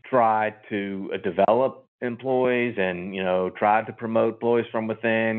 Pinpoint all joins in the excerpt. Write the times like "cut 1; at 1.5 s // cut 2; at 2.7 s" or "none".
none